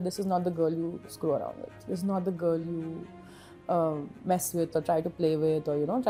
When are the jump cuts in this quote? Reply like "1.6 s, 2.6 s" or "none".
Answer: none